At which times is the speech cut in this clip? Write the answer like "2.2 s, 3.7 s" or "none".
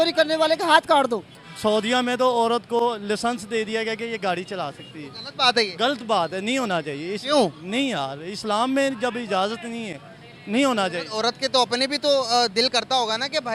1.5 s